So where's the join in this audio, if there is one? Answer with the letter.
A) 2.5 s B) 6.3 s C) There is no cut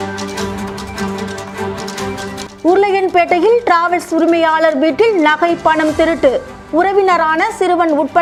C